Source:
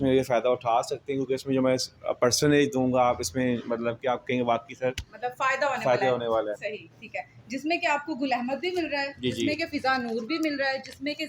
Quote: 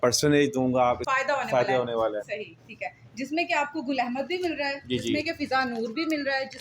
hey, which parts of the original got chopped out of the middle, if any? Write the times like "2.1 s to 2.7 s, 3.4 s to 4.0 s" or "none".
3.2 s to 5.4 s